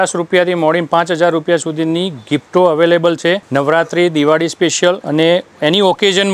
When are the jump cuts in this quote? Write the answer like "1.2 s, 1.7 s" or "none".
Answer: 3.4 s, 5.0 s